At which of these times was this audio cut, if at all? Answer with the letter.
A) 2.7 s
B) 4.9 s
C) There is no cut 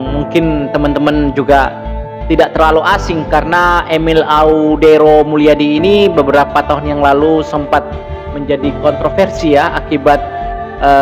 C